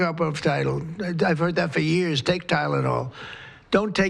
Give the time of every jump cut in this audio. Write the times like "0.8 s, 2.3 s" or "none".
none